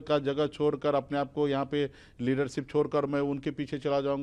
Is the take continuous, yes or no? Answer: yes